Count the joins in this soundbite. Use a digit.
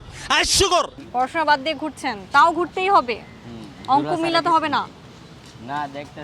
1